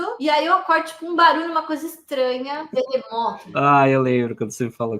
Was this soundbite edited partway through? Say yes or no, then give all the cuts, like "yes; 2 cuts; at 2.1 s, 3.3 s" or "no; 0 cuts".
no; 0 cuts